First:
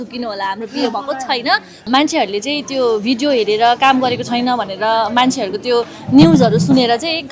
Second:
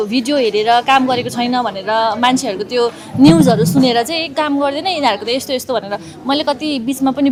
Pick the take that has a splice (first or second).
first